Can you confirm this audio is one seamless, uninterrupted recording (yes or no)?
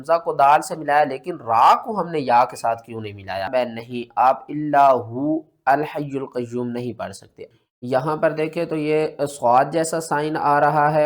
no